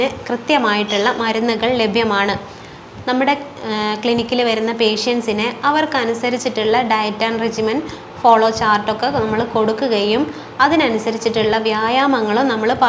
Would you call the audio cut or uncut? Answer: uncut